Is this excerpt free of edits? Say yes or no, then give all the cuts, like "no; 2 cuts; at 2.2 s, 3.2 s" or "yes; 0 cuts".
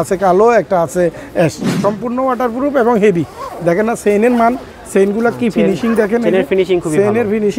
no; 1 cut; at 1.7 s